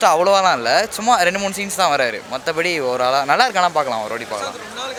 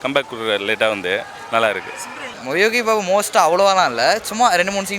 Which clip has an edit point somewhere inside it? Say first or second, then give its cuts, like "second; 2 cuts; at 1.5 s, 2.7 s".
second; 1 cut; at 2.3 s